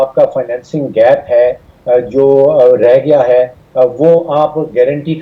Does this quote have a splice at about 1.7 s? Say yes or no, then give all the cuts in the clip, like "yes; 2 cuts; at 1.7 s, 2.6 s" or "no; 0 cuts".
no; 0 cuts